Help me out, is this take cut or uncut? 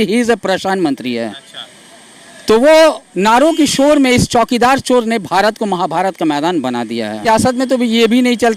cut